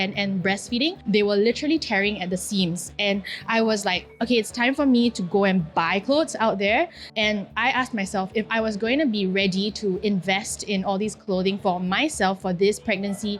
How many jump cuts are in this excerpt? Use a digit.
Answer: 2